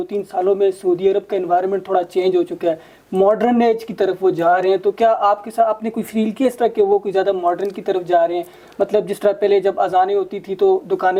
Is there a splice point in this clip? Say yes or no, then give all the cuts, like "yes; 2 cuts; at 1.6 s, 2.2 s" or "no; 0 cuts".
no; 0 cuts